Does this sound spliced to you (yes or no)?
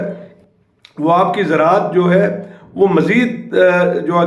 no